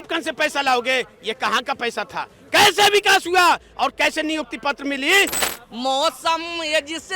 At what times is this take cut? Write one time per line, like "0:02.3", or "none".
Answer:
0:05.6